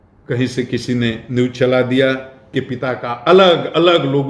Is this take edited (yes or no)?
yes